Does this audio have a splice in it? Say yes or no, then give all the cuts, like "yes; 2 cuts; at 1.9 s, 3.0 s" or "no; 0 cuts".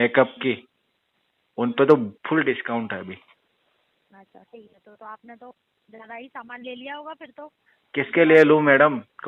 no; 0 cuts